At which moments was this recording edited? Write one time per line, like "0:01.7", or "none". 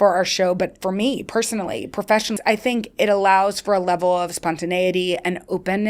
0:02.3